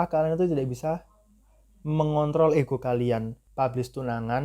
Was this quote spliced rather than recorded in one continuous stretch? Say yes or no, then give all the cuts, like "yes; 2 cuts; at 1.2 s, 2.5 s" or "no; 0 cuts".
yes; 1 cut; at 3.4 s